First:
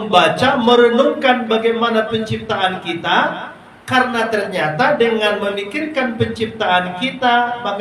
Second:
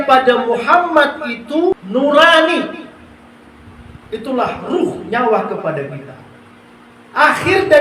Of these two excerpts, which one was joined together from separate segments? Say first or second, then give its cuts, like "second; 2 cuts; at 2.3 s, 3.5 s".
second; 1 cut; at 1.7 s